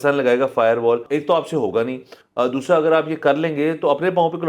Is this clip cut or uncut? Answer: cut